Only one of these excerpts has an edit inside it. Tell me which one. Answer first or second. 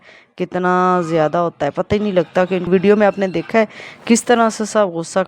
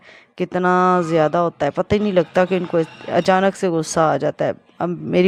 first